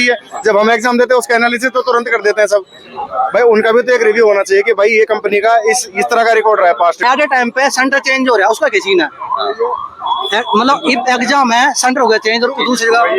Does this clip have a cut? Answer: yes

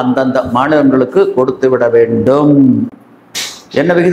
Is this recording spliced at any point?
no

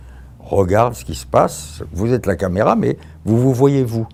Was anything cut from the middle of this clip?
no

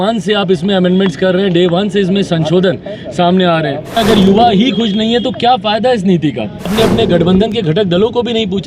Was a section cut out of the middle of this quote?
yes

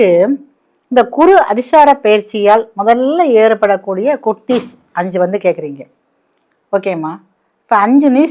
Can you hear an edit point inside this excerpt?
no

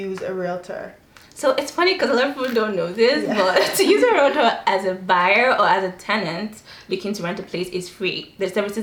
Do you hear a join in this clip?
no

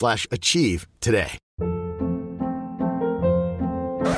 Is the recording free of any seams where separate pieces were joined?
yes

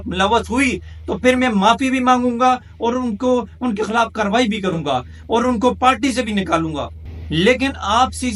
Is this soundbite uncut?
yes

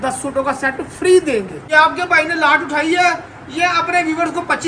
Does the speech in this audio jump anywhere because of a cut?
yes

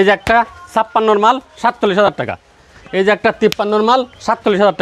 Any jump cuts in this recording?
no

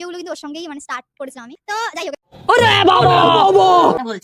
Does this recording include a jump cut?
no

